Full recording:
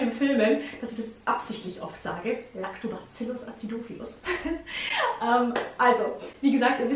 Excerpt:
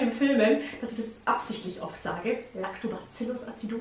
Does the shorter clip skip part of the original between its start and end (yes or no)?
no